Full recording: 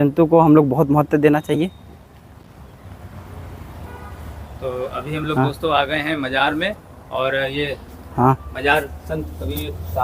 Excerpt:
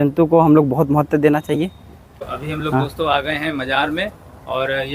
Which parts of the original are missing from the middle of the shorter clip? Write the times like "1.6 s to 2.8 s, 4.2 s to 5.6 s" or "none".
2.3 s to 4.9 s